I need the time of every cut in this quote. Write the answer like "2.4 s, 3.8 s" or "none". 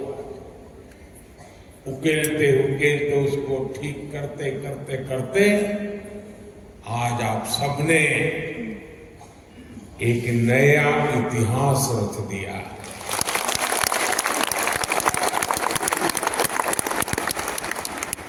none